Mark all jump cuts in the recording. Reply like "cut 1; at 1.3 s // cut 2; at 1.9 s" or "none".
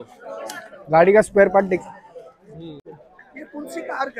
cut 1; at 3.0 s